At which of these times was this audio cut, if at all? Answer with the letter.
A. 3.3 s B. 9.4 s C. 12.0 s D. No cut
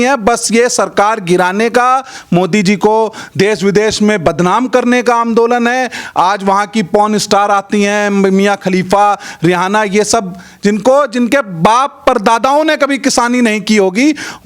D